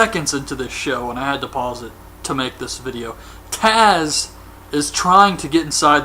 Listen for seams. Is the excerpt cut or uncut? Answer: cut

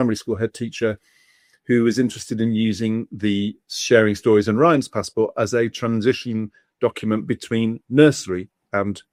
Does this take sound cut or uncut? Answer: uncut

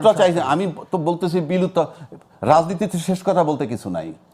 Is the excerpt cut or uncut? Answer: uncut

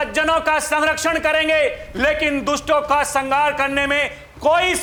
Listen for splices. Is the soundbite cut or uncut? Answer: uncut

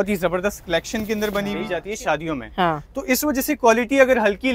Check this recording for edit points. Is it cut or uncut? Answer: cut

